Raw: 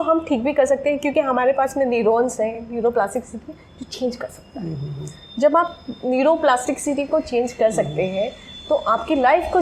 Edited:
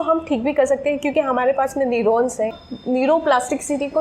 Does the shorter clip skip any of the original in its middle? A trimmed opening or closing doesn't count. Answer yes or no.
yes